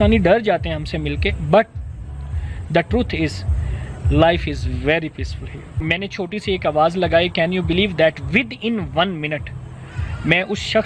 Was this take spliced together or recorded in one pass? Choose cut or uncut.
cut